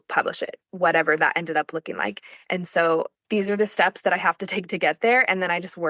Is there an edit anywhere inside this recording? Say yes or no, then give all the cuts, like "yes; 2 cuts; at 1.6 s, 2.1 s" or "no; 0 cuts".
no; 0 cuts